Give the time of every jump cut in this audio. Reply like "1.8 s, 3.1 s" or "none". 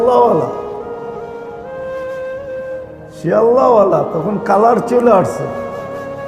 none